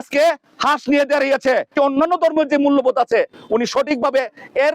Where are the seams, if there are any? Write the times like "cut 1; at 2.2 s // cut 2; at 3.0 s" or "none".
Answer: cut 1; at 1.7 s